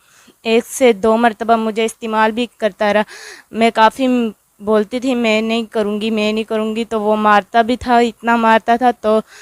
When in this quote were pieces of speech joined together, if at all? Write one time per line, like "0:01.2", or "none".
none